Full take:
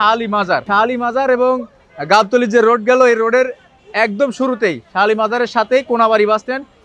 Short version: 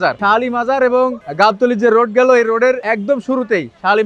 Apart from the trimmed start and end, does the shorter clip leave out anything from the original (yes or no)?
yes